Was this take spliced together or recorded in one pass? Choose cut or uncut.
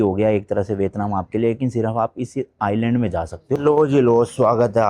cut